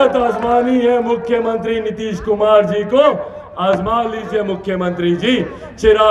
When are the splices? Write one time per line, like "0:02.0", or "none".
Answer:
none